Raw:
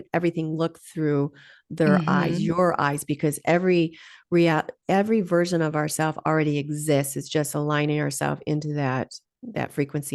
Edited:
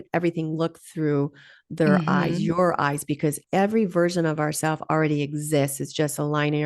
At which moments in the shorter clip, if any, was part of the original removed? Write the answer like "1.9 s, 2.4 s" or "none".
3.4 s